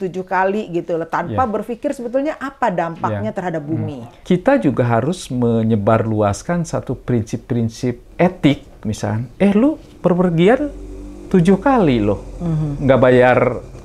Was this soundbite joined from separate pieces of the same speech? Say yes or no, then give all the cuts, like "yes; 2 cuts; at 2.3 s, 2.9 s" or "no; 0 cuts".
yes; 1 cut; at 4.1 s